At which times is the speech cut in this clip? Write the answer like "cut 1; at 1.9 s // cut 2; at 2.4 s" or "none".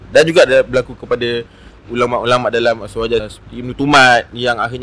cut 1; at 3.3 s